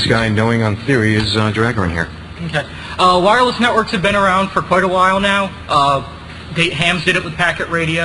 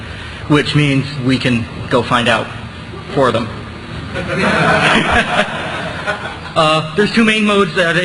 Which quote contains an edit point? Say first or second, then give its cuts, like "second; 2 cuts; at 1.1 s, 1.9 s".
first; 1 cut; at 5.0 s